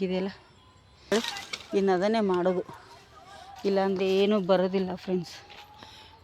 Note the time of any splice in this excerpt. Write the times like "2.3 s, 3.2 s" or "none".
1.1 s